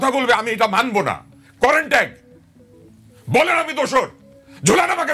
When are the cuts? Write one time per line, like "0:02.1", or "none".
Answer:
none